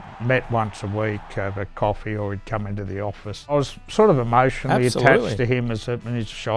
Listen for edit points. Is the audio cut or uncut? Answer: cut